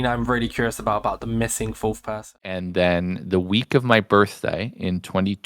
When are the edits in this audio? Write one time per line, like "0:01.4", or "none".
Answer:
0:02.5